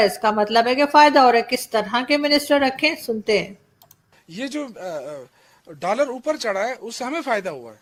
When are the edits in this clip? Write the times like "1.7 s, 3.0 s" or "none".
none

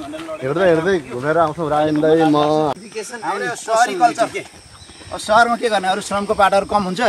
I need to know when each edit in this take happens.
2.8 s

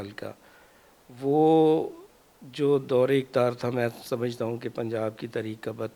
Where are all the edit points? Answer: none

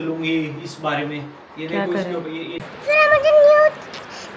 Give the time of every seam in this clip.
2.7 s

